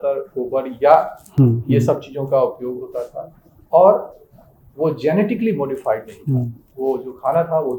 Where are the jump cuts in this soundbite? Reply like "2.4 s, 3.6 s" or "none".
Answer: none